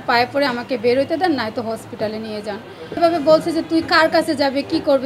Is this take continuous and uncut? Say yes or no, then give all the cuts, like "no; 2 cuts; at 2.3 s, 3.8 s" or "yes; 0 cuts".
no; 1 cut; at 3.0 s